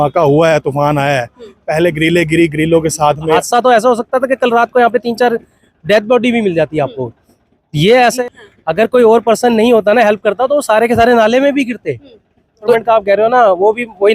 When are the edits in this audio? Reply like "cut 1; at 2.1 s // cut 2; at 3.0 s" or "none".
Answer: cut 1; at 3.4 s // cut 2; at 8.2 s // cut 3; at 12.7 s